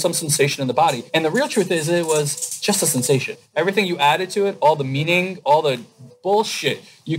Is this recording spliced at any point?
yes; 2 cuts; at 1.0 s, 3.4 s

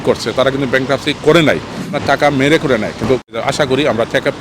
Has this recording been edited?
yes; 2 cuts; at 1.9 s, 3.3 s

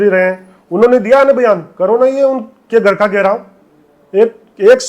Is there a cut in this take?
no; 0 cuts

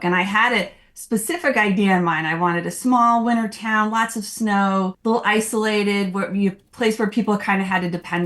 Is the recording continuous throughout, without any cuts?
no; 1 cut; at 4.9 s

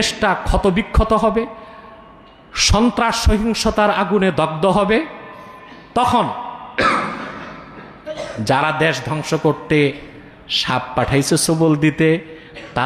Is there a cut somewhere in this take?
no; 0 cuts

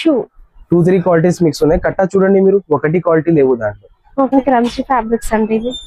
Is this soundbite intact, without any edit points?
no; 1 cut; at 4.3 s

